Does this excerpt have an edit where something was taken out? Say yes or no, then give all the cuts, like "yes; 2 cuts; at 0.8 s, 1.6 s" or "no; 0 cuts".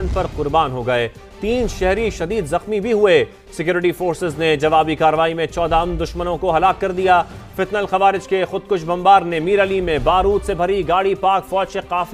no; 0 cuts